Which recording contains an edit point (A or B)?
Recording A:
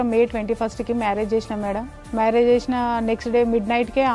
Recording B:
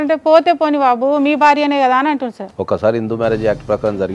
B